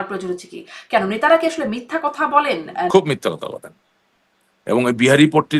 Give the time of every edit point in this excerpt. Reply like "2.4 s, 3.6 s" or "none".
2.9 s